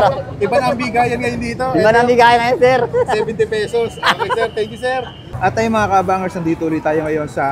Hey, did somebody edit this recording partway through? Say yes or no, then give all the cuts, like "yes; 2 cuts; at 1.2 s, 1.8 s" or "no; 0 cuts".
no; 0 cuts